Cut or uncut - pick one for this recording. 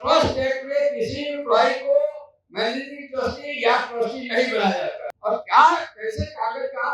cut